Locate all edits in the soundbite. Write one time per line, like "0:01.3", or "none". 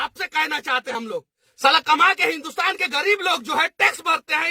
0:00.9